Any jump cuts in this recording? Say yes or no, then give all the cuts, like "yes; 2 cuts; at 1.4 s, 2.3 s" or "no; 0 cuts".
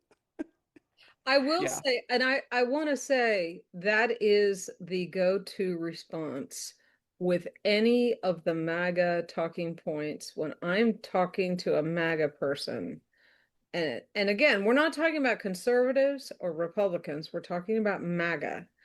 no; 0 cuts